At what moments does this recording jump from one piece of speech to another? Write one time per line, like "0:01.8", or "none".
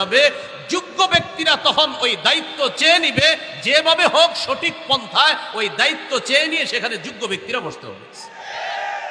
none